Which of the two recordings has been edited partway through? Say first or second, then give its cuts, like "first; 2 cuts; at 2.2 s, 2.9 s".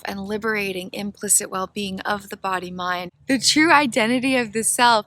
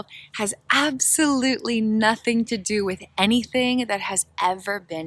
first; 1 cut; at 3.1 s